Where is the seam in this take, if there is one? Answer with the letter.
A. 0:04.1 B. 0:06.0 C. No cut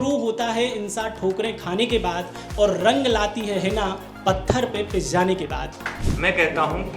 B